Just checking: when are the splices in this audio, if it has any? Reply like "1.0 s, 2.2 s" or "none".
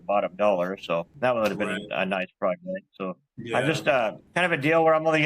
1.1 s, 3.0 s, 4.2 s